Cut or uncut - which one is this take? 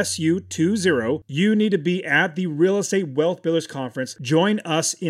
cut